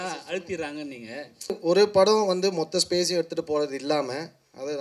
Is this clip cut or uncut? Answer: cut